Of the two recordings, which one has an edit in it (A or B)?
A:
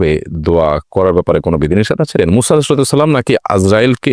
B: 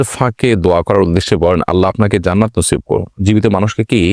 A